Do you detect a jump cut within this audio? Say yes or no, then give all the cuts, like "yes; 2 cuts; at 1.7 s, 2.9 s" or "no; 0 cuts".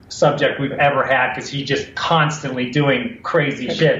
no; 0 cuts